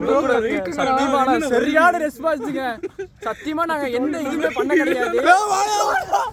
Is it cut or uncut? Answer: uncut